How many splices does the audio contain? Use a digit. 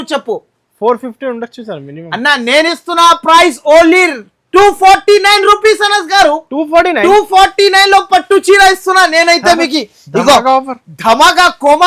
0